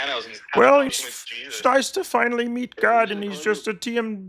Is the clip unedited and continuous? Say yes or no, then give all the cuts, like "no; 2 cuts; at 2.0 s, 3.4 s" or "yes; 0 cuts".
yes; 0 cuts